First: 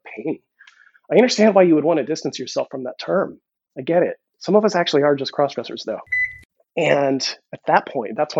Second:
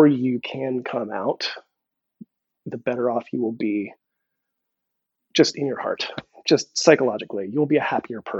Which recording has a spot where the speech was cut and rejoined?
first; 2 cuts; at 4.3 s, 6.1 s

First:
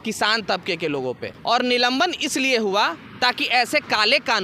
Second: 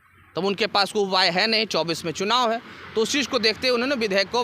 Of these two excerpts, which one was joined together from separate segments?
first; 1 cut; at 1.3 s

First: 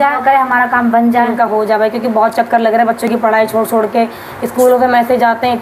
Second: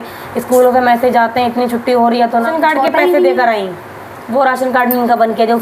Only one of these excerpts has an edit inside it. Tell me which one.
second; 1 cut; at 2.5 s

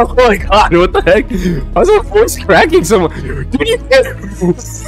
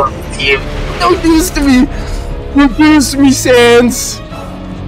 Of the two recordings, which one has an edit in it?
second; 1 cut; at 4.0 s

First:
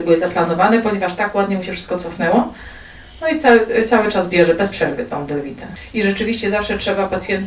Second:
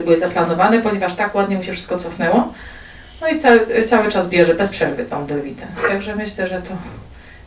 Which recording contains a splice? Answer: first; 1 cut; at 5.7 s

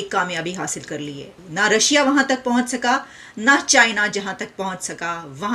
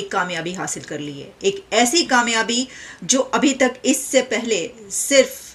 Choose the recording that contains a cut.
first; 1 cut; at 1.2 s

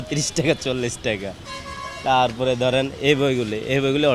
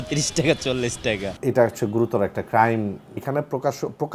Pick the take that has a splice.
second; 2 cuts; at 1.4 s, 3.2 s

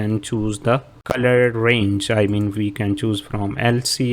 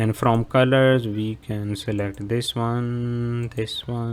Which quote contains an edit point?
first; 1 cut; at 0.9 s

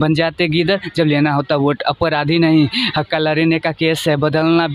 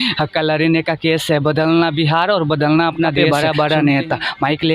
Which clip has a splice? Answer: second; 1 cut; at 3.2 s

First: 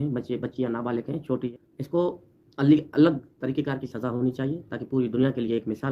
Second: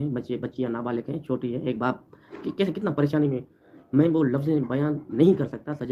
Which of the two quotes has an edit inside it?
first; 1 cut; at 1.5 s

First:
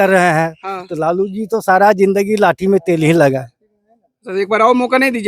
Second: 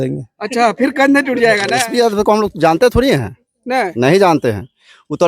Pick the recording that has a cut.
second; 1 cut; at 1.8 s

